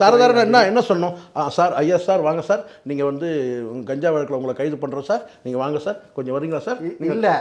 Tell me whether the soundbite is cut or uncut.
uncut